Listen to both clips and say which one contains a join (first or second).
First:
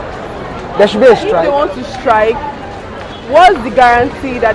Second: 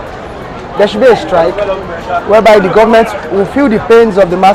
first